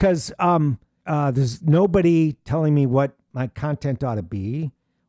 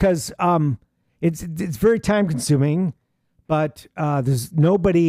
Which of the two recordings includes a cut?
first; 1 cut; at 0.9 s

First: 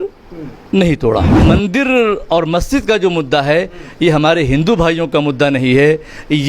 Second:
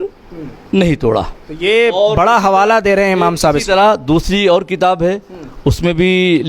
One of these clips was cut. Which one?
first; 1 cut; at 1.3 s

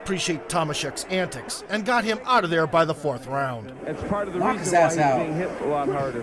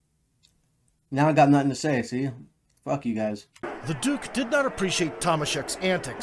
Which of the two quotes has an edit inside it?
second; 1 cut; at 3.6 s

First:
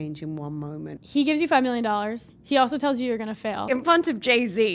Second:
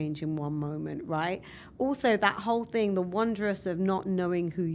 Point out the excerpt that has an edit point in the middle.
first; 2 cuts; at 1.0 s, 3.7 s

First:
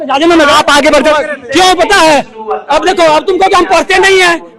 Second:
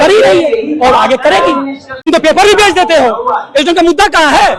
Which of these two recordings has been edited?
second; 1 cut; at 2.0 s

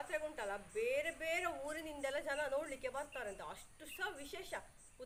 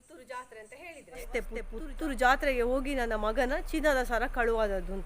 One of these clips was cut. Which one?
second; 1 cut; at 1.3 s

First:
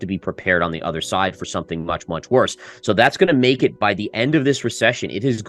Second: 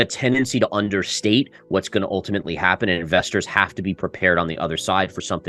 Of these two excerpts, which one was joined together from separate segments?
first; 1 cut; at 2.6 s

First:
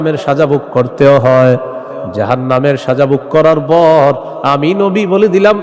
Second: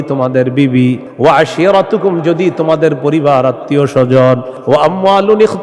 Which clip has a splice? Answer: second; 2 cuts; at 1.1 s, 4.5 s

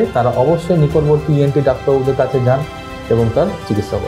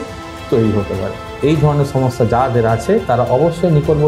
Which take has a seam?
second; 1 cut; at 1.2 s

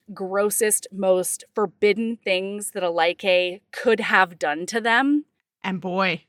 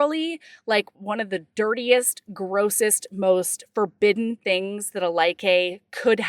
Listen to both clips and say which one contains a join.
second; 1 cut; at 0.9 s

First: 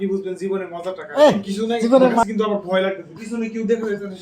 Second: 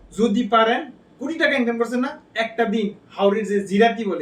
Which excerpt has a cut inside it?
first; 1 cut; at 2.2 s

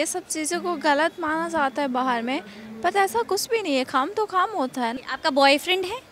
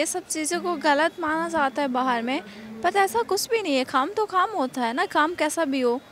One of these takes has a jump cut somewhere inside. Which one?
first; 1 cut; at 4.9 s

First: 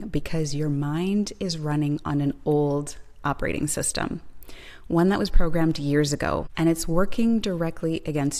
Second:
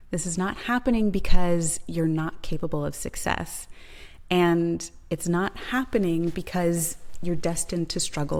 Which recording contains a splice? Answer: first; 1 cut; at 6.5 s

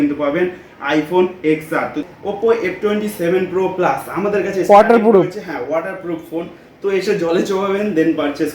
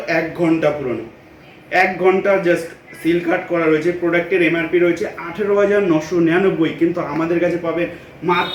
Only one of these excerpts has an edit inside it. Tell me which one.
first; 1 cut; at 2.0 s

